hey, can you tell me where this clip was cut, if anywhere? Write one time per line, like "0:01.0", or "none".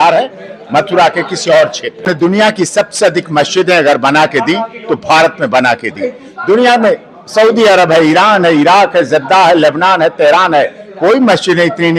0:02.1